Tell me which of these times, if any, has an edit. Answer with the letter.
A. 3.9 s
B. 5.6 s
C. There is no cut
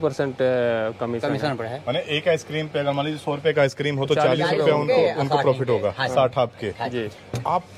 C